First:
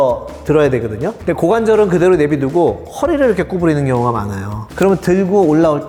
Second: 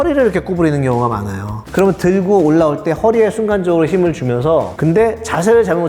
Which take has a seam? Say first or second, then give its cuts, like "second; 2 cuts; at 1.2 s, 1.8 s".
second; 1 cut; at 4.7 s